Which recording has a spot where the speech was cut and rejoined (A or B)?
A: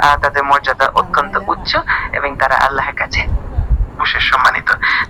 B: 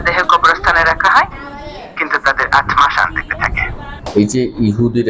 B